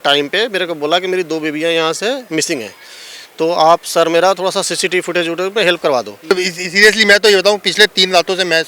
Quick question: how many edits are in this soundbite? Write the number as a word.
one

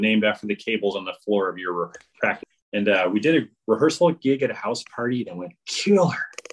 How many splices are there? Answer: one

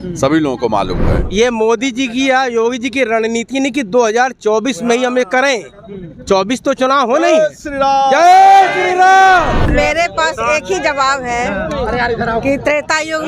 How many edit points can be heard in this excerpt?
two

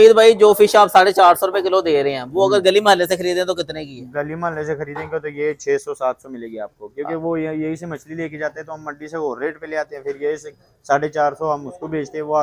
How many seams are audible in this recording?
zero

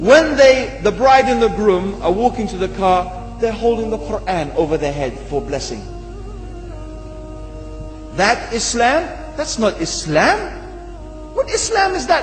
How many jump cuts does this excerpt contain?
zero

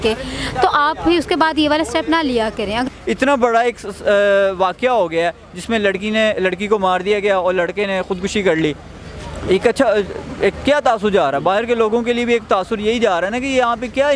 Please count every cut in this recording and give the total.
one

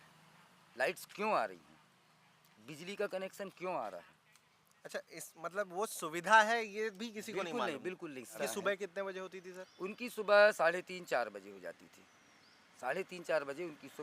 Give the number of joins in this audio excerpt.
one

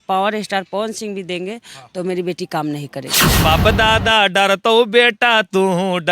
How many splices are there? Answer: one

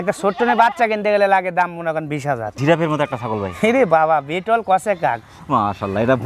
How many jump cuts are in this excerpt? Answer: one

